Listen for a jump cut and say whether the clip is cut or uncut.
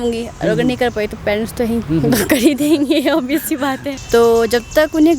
cut